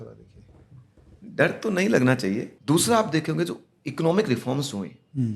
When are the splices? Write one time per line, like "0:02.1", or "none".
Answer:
0:02.5